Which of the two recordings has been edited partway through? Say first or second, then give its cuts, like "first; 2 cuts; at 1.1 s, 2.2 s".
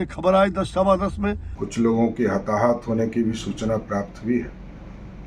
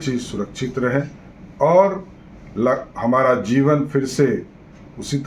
first; 1 cut; at 1.5 s